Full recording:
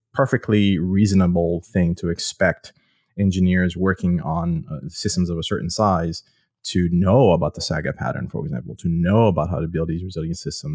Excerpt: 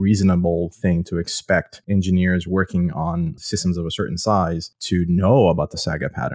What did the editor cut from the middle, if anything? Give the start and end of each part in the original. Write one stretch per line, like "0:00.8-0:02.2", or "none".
0:02.7-0:03.0
0:04.7-0:04.9
0:06.2-0:06.5

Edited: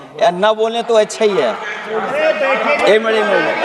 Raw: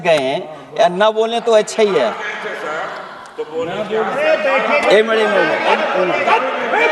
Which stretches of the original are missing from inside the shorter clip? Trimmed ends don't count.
0:02.4-0:03.9

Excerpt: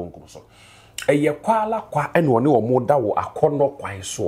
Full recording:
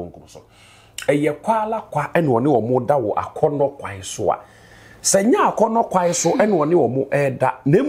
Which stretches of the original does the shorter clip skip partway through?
none

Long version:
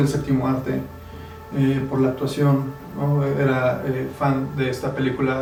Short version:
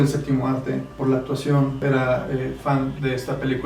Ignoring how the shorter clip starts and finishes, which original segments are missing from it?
0:01.0-0:01.9
0:02.7-0:03.4

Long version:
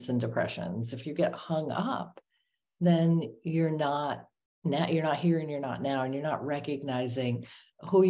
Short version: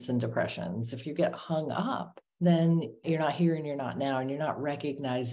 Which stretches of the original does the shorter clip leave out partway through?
0:02.2-0:02.6
0:03.4-0:04.9

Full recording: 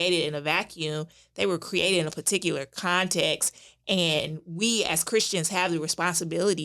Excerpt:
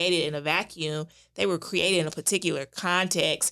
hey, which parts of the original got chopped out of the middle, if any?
none

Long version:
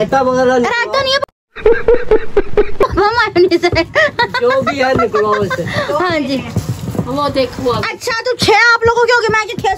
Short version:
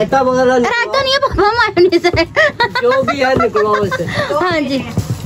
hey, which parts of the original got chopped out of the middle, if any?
0:01.3-0:02.9

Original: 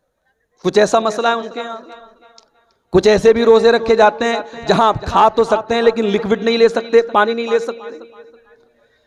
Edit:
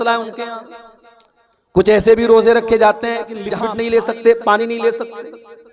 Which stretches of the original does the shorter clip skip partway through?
0:04.6-0:06.1

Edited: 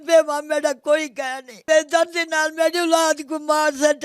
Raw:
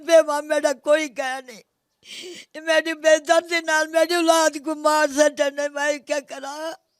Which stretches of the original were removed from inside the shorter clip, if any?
0:01.6-0:02.9

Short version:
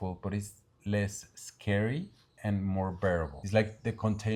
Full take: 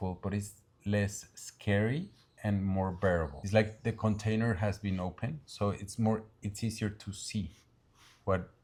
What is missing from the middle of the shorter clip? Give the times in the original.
none

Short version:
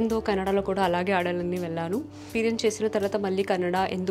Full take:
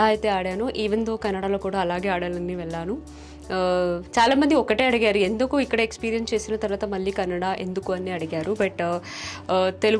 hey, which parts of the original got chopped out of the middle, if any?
0:03.2-0:06.0

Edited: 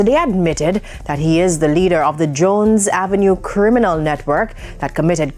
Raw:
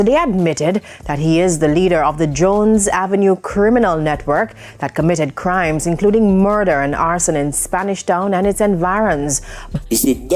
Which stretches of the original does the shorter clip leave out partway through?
none

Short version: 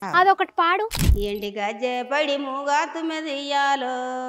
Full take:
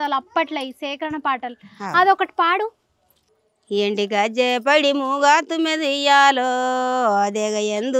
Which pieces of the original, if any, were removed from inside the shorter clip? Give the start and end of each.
0:02.8-0:03.6

